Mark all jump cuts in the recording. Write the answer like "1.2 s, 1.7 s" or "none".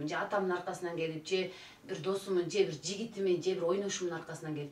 none

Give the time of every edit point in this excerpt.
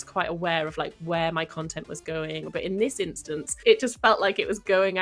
2.5 s, 3.6 s

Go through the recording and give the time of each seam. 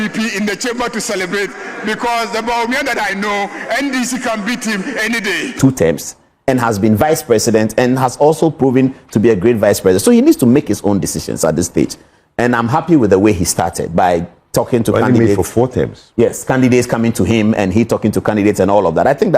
5.6 s

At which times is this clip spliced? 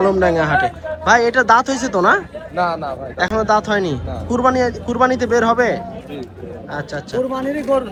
none

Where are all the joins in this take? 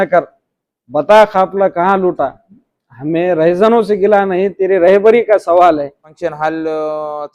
6.1 s

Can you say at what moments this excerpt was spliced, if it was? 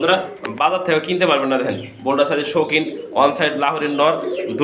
none

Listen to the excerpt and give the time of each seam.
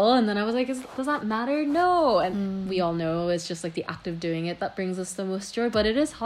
2.5 s

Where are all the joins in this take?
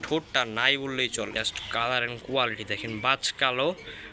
1.3 s

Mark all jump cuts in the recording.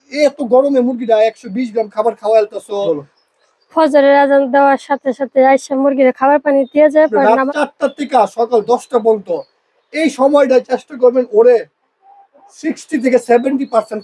2.8 s, 7.2 s

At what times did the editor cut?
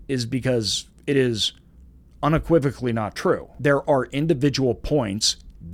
3.5 s

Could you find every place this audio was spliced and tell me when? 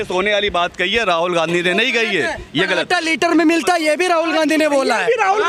none

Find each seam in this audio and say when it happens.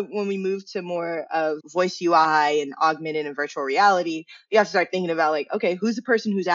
none

